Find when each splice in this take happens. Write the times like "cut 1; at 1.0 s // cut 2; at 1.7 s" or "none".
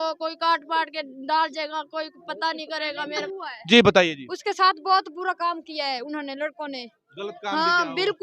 cut 1; at 3.3 s